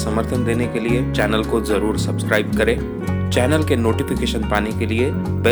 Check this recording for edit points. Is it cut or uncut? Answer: uncut